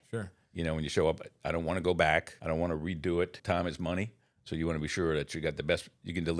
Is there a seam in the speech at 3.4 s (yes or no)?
yes